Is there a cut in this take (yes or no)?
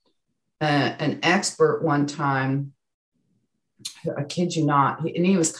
no